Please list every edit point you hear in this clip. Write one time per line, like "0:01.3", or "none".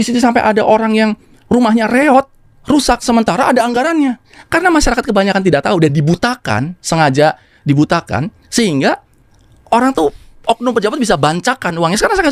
none

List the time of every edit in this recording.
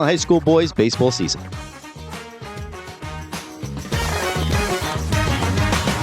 0:01.3

